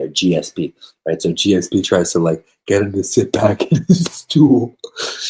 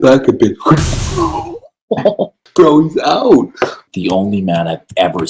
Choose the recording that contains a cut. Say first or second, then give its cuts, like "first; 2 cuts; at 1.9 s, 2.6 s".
second; 2 cuts; at 2.4 s, 3.8 s